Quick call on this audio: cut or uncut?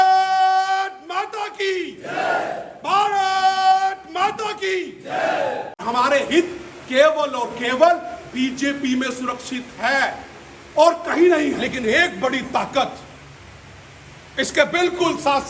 cut